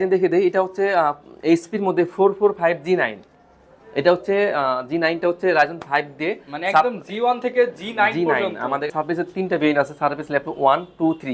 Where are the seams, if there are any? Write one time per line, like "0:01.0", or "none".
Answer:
0:08.9